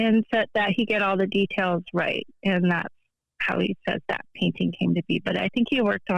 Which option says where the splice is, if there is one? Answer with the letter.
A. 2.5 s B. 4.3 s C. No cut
C